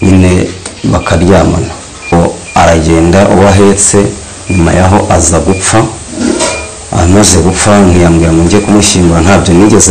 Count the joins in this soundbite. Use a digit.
1